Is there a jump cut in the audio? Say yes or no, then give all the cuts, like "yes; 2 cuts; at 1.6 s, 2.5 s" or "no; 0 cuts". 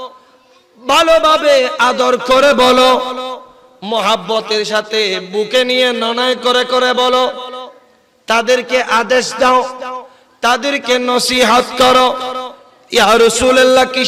no; 0 cuts